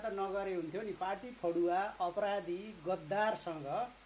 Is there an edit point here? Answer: no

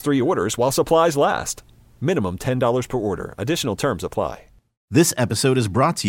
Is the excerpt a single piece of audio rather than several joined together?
no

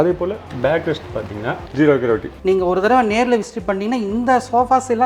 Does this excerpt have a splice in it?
yes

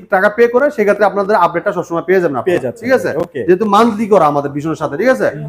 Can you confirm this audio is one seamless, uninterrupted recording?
yes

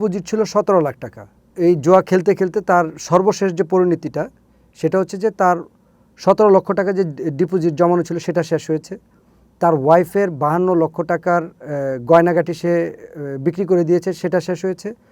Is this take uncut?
no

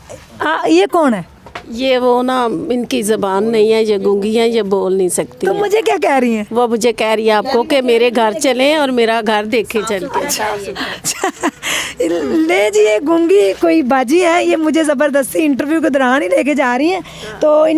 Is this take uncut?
yes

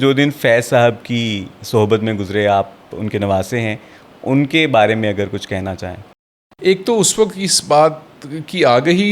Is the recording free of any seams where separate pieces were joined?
yes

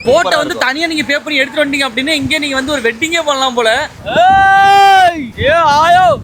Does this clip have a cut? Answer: yes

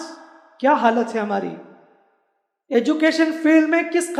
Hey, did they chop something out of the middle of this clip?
no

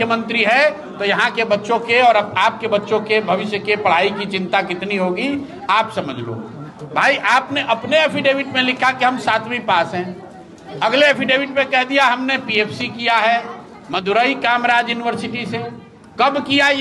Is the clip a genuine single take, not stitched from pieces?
yes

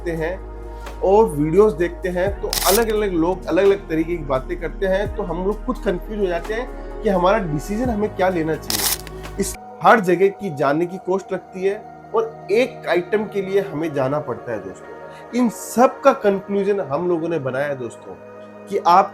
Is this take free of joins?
no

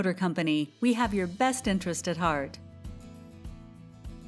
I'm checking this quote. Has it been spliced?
yes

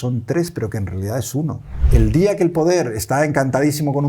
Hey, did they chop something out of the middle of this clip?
yes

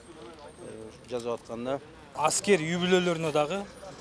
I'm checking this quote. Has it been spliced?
yes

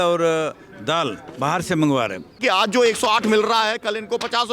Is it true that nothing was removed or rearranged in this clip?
no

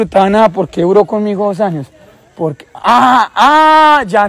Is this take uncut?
yes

